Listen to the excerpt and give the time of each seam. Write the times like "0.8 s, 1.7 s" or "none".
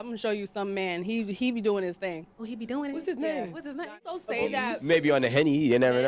4.0 s